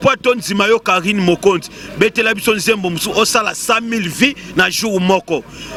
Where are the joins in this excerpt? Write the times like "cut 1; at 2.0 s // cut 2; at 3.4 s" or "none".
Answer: none